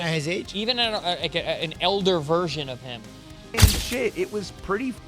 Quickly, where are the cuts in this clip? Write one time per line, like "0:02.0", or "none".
0:03.6